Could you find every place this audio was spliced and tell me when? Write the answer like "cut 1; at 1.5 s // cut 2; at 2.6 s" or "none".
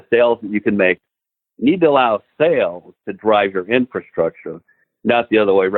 cut 1; at 1.0 s

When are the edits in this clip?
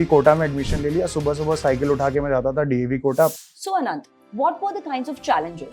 cut 1; at 3.4 s

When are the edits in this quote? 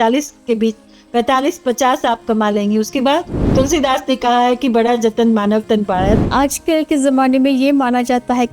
cut 1; at 3.5 s // cut 2; at 6.2 s

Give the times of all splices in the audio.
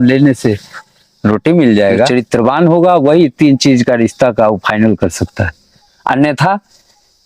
cut 1; at 2.1 s

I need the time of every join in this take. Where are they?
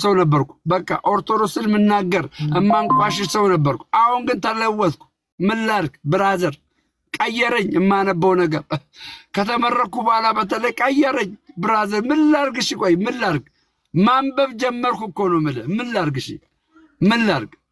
none

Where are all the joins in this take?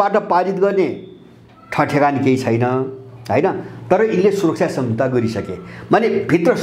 none

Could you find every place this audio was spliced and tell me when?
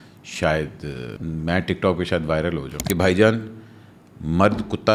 cut 1; at 1.1 s // cut 2; at 2.7 s

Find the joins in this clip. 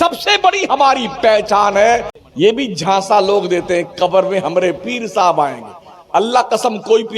cut 1; at 2.1 s

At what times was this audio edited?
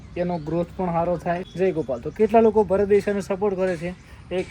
cut 1; at 1.5 s

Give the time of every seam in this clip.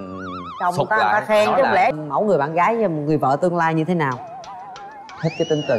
cut 1; at 1.9 s

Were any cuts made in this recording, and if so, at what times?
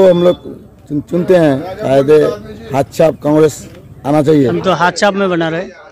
cut 1; at 4.5 s

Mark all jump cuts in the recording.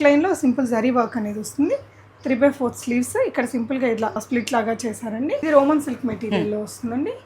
cut 1; at 4.2 s // cut 2; at 5.4 s

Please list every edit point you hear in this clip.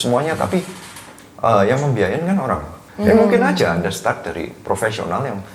cut 1; at 2.8 s

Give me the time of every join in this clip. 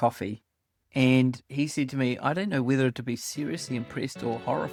none

